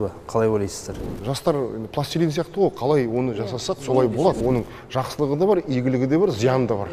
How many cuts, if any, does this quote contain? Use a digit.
2